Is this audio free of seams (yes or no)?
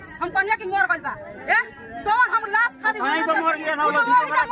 yes